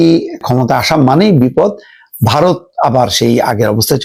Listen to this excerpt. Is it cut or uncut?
uncut